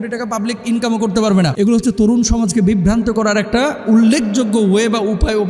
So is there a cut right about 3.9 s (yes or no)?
no